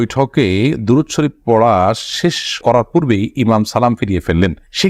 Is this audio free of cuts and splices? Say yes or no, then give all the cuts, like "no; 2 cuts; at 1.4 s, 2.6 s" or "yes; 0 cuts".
yes; 0 cuts